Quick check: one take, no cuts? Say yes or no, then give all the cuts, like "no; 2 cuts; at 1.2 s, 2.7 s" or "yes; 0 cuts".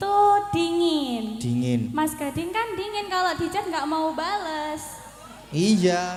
yes; 0 cuts